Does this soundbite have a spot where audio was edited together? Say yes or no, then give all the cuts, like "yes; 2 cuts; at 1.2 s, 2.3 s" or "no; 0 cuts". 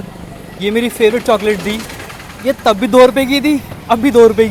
no; 0 cuts